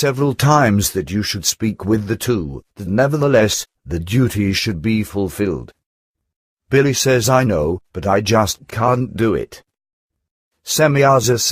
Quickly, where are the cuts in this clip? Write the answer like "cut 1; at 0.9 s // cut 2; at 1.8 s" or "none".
cut 1; at 2.5 s